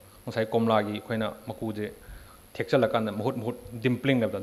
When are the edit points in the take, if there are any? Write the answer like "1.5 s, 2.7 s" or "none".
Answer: none